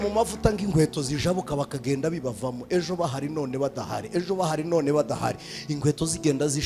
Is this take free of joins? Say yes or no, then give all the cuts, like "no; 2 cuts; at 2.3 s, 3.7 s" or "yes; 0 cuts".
yes; 0 cuts